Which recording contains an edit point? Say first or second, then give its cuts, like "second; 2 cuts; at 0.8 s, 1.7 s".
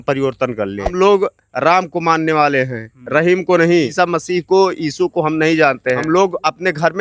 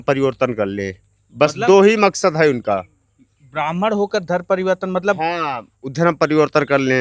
first; 3 cuts; at 0.9 s, 3.9 s, 6.0 s